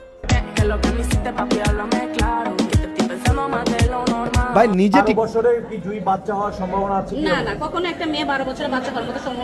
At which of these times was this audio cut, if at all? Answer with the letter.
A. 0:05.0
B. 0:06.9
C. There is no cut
A